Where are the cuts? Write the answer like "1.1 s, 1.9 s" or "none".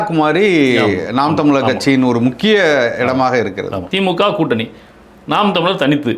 3.8 s